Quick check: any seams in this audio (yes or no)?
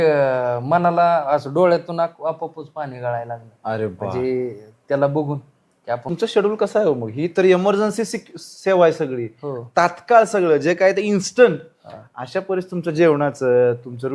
yes